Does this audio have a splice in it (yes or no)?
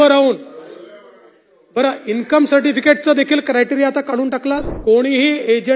yes